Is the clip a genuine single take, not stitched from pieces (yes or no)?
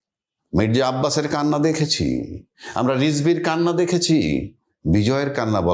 yes